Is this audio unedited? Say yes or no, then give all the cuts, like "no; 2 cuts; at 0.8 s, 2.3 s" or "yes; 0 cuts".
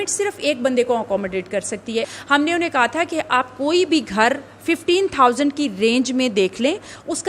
no; 1 cut; at 2.1 s